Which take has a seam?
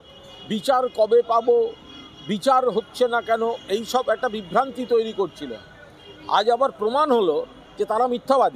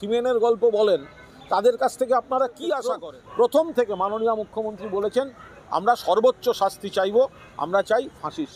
second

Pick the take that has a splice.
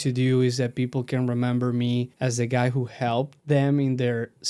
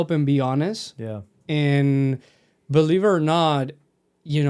first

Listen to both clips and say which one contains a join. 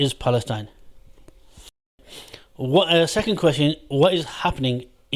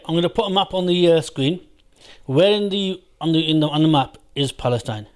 first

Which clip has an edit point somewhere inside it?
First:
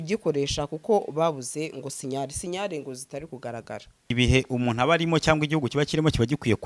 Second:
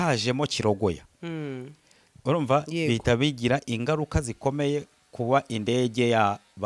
first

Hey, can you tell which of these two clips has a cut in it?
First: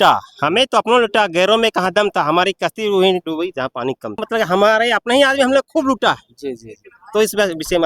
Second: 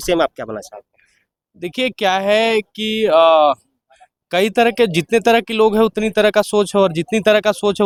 first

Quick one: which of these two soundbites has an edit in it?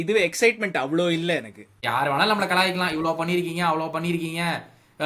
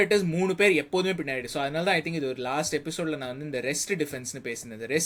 first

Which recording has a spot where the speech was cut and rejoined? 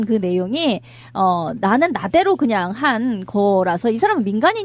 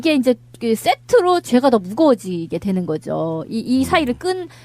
first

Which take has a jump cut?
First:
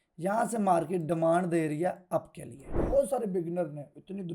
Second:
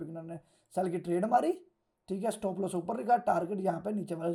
first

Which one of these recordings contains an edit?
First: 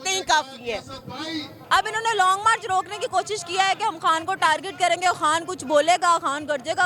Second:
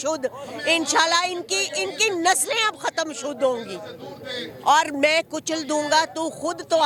first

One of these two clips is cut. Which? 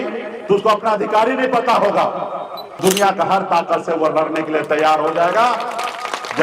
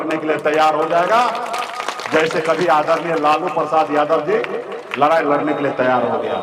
first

